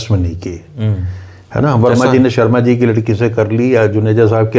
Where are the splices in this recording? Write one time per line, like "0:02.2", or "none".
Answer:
none